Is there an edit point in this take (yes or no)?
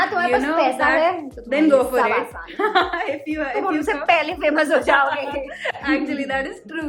no